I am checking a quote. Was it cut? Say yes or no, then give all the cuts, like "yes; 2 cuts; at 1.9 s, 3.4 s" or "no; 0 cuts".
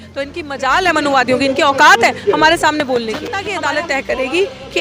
yes; 1 cut; at 3.5 s